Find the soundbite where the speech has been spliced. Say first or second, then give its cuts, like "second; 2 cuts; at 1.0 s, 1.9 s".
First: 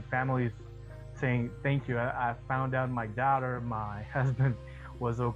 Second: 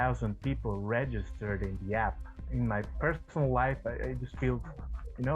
second; 1 cut; at 2.4 s